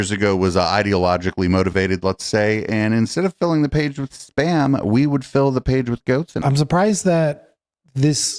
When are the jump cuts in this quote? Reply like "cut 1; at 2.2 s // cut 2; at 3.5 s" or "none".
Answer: cut 1; at 6.4 s